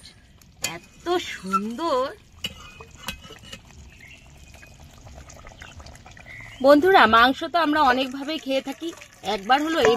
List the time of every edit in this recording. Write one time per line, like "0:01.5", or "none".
0:02.3